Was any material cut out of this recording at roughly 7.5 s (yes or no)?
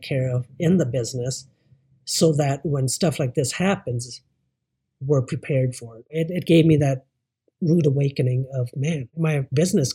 no